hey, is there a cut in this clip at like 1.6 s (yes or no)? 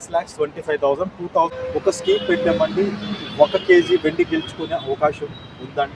yes